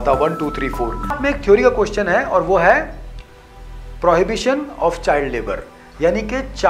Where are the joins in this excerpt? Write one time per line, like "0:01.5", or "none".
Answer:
0:01.2